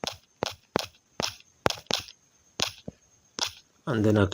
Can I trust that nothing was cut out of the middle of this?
no; 1 cut; at 1.0 s

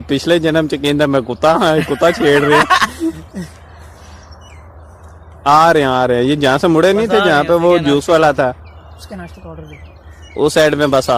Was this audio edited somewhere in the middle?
no; 0 cuts

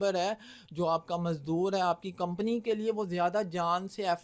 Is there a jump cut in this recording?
no; 0 cuts

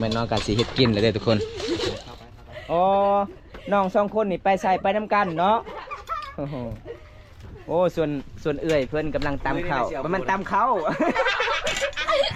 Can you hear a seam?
no; 0 cuts

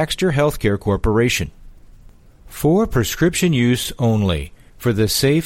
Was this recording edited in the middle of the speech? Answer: no; 0 cuts

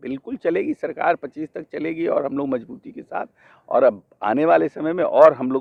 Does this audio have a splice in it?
no; 0 cuts

